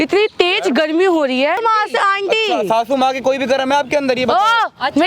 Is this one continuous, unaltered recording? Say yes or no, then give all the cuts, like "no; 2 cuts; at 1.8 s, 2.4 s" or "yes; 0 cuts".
no; 1 cut; at 1.6 s